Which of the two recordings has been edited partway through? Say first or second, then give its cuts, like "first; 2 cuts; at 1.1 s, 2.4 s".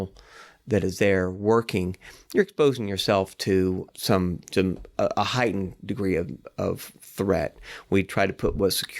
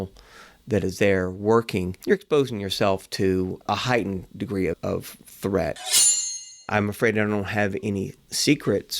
second; 4 cuts; at 1.9 s, 3.6 s, 4.8 s, 6.1 s